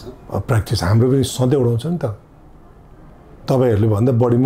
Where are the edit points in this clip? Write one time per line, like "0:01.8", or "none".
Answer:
none